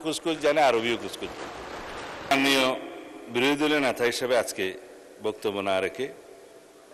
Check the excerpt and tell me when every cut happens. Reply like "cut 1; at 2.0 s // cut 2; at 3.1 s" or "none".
cut 1; at 2.3 s